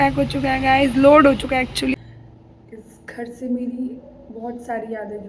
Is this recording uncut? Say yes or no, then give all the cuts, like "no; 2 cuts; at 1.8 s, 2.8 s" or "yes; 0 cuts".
no; 1 cut; at 2.0 s